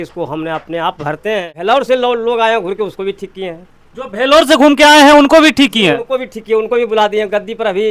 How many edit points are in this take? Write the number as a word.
one